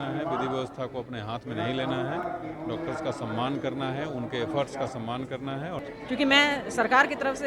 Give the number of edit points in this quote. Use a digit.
1